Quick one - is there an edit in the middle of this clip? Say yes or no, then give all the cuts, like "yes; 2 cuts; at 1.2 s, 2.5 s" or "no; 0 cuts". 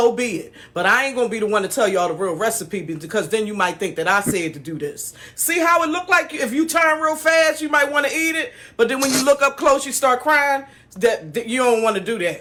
no; 0 cuts